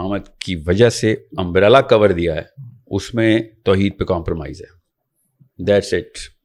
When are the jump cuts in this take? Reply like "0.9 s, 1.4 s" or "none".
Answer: none